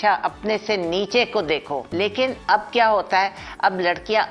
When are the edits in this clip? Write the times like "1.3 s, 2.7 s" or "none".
1.9 s

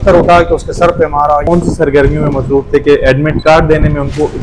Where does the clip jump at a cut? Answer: 1.4 s

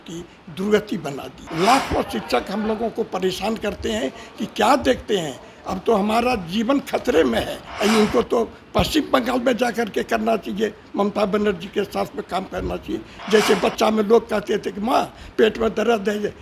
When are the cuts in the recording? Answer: 1.4 s, 7.6 s, 13.1 s

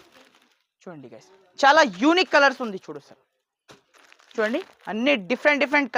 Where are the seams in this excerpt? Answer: 1.3 s

